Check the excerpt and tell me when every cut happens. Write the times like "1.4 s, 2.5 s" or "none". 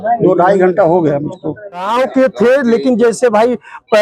1.9 s